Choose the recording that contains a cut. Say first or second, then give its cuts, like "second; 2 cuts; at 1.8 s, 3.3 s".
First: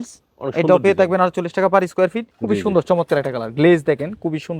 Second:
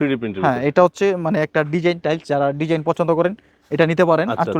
first; 1 cut; at 2.3 s